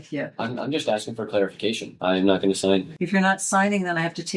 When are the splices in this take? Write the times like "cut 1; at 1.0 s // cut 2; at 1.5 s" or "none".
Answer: cut 1; at 1.9 s